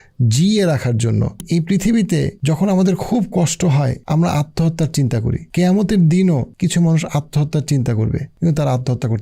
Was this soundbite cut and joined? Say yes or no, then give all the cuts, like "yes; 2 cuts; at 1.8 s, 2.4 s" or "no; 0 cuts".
yes; 6 cuts; at 1.4 s, 2.3 s, 4.0 s, 5.4 s, 6.5 s, 8.3 s